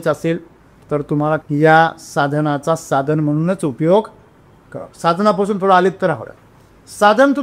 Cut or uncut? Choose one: cut